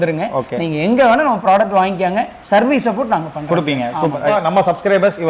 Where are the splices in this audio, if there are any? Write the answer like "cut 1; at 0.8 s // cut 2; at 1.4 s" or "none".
none